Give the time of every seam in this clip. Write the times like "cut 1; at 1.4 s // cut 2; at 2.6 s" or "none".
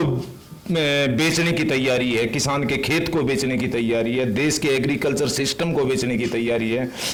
none